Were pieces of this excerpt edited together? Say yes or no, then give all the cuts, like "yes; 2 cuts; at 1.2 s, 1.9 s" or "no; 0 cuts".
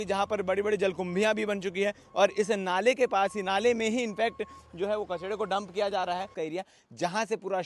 yes; 1 cut; at 6.3 s